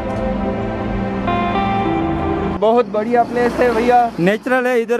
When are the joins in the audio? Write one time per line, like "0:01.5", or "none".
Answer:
0:02.6